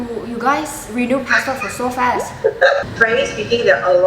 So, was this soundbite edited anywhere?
yes; 1 cut; at 2.9 s

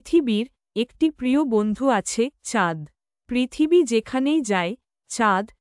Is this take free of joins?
yes; 0 cuts

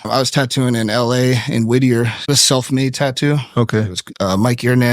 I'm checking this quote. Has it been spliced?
yes; 2 cuts; at 2.2 s, 4.0 s

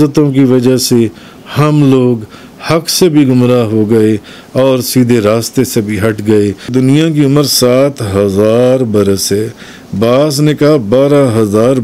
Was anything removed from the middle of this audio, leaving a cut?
yes; 1 cut; at 6.7 s

